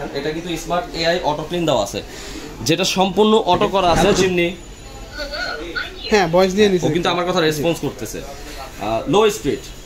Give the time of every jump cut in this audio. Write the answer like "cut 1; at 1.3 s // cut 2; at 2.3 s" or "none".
cut 1; at 4.2 s